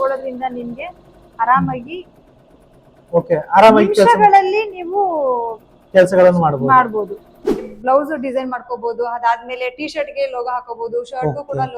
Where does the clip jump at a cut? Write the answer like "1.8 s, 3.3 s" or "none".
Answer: 7.7 s